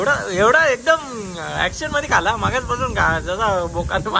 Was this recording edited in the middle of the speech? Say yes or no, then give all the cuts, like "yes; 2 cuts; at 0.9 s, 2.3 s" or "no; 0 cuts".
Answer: no; 0 cuts